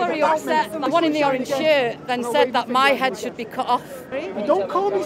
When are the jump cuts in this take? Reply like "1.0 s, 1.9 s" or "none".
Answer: 0.8 s, 4.1 s